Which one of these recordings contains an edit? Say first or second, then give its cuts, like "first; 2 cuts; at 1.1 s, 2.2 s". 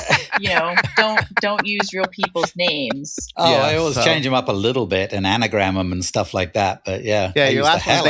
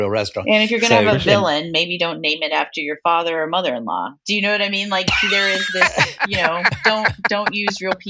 first; 1 cut; at 3.3 s